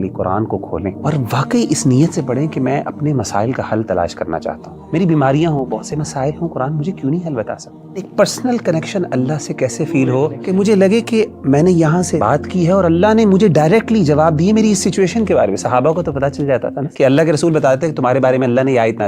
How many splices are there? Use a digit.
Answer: 6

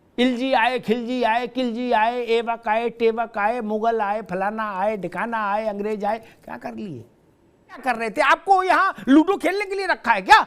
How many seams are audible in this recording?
1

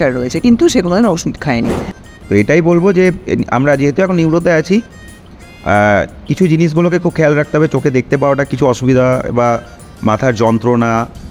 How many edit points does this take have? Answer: 1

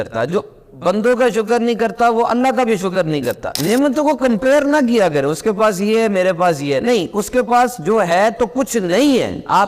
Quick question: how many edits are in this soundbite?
1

